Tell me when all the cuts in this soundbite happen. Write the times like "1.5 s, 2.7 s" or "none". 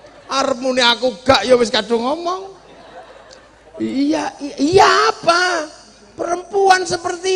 none